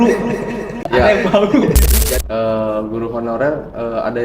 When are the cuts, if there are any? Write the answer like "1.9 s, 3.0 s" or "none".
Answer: 1.9 s